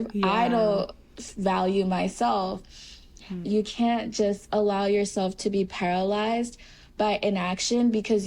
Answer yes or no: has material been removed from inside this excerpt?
yes